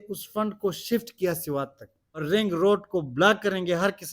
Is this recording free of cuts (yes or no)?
no